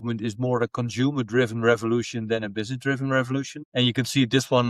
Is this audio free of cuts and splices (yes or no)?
no